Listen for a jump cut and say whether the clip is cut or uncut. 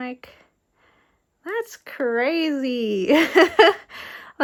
uncut